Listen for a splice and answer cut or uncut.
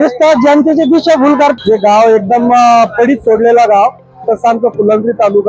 cut